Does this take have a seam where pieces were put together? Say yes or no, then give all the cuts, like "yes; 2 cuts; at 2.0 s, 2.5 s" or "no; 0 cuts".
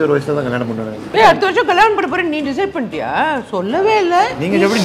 yes; 1 cut; at 1.1 s